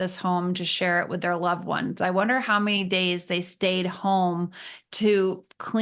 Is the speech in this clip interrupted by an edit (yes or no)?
no